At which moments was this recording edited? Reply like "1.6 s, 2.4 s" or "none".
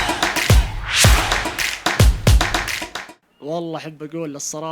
none